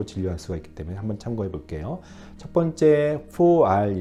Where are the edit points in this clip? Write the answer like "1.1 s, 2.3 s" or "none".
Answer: none